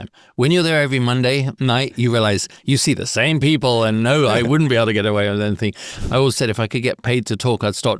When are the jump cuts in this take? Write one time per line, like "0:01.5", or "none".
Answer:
0:05.9